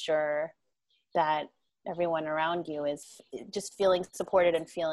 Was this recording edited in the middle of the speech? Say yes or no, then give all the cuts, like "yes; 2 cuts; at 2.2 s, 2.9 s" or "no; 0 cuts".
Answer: yes; 1 cut; at 3.0 s